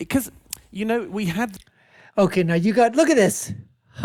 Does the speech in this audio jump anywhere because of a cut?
no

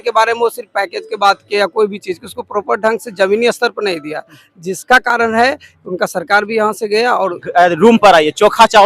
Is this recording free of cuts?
no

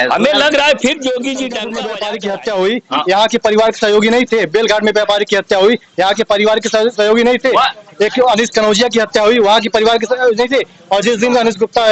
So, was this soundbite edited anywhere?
yes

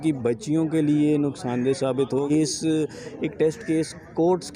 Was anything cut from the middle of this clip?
yes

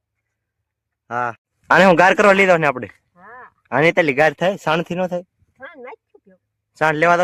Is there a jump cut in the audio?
yes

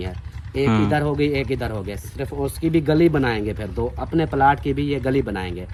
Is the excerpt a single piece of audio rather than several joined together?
yes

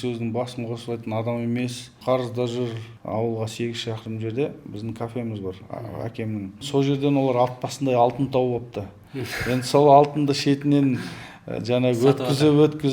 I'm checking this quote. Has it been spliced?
yes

